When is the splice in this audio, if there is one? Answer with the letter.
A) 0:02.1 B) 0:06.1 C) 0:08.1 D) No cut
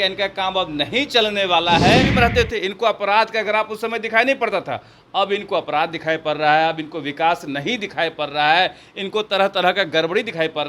A